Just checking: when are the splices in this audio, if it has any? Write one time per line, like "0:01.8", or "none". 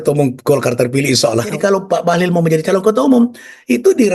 0:01.5